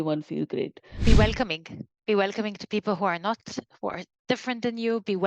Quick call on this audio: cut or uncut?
cut